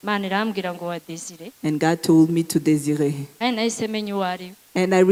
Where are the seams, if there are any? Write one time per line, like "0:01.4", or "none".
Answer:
none